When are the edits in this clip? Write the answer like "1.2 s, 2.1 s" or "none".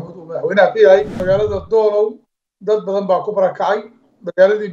1.2 s